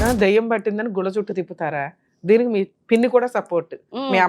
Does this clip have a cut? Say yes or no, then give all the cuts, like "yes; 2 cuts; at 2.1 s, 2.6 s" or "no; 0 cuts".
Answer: yes; 1 cut; at 2.8 s